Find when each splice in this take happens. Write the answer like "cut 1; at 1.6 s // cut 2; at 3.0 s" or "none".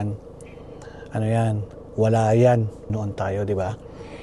cut 1; at 2.8 s